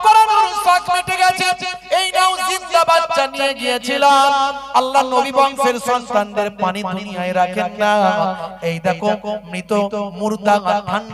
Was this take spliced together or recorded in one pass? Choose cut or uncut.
uncut